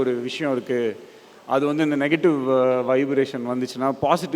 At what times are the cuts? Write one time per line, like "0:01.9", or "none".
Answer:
none